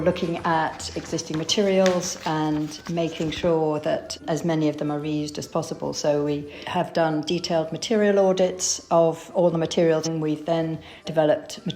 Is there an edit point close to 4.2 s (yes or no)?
no